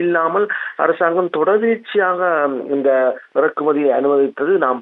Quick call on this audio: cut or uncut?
uncut